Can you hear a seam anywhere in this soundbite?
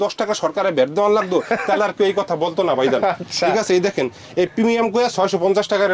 no; 0 cuts

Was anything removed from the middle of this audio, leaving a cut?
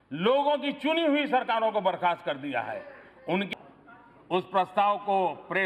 yes; 1 cut; at 3.5 s

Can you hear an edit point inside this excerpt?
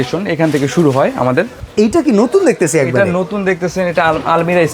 yes; 1 cut; at 1.6 s

